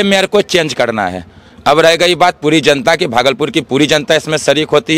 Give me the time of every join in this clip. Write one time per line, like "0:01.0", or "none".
none